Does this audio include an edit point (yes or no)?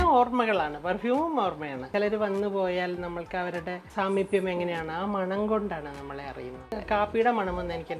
yes